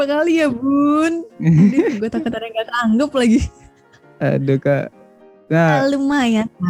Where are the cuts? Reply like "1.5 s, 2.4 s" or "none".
none

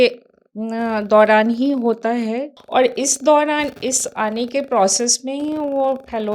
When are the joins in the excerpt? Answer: 2.5 s

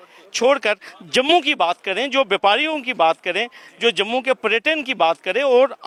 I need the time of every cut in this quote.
none

